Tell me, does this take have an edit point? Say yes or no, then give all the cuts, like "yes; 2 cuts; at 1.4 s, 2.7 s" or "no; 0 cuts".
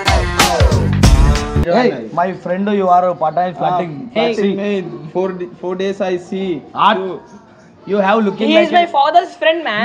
yes; 1 cut; at 1.6 s